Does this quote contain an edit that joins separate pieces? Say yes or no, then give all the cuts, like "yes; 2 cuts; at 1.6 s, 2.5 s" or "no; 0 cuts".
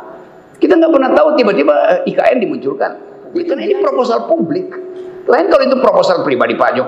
yes; 1 cut; at 3.3 s